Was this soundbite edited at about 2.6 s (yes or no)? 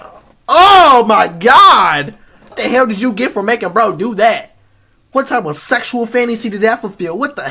yes